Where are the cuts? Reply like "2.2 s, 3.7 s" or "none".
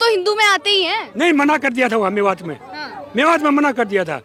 none